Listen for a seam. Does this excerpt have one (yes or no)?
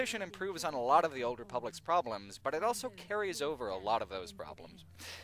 yes